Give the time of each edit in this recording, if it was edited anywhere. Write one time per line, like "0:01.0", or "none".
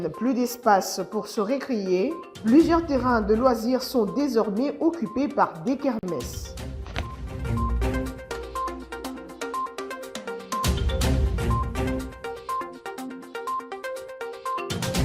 0:12.3